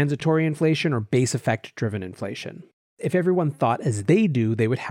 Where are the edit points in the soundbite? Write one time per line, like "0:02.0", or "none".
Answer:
0:02.9